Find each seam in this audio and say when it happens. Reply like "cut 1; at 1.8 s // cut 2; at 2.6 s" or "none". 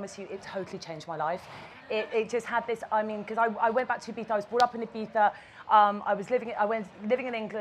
cut 1; at 4.6 s